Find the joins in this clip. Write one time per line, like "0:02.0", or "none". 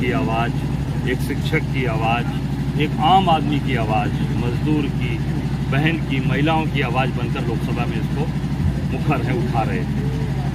none